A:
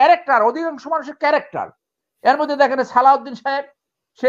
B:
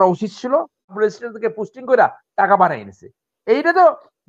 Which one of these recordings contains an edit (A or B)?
B